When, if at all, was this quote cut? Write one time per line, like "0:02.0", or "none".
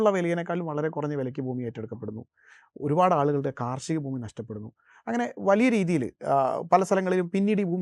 none